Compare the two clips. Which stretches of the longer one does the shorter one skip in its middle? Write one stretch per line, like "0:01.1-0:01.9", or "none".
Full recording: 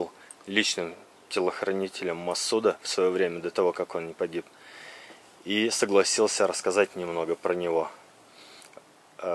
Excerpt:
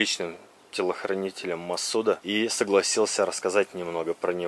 0:02.8-0:05.4